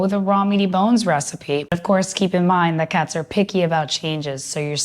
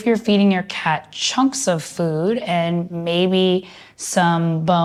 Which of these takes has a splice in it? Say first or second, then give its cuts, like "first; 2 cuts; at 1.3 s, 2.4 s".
first; 1 cut; at 1.8 s